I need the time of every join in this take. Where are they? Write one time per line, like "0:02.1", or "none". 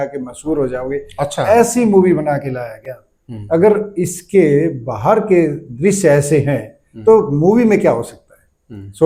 none